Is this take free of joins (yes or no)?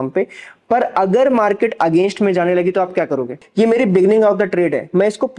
no